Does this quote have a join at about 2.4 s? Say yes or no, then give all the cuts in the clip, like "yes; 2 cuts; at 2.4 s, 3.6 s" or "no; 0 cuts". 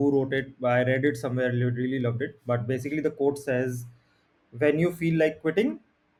no; 0 cuts